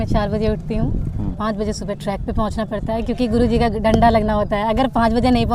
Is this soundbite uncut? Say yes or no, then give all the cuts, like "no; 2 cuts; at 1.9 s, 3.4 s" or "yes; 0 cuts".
no; 1 cut; at 1.3 s